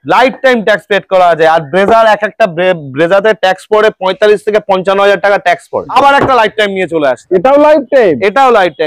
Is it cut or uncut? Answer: cut